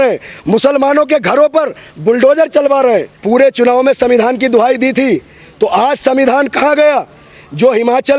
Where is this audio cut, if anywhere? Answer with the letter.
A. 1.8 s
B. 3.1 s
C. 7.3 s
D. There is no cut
B